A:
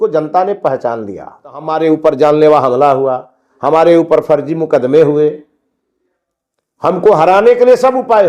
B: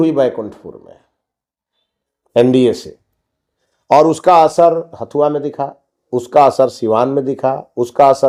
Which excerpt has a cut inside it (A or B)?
A